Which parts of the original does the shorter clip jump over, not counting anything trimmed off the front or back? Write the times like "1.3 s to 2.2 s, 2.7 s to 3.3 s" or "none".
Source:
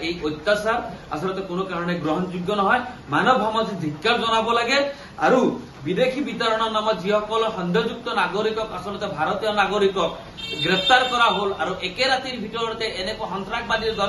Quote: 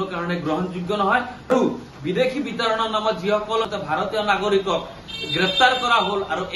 3.1 s to 5.3 s, 7.5 s to 9.0 s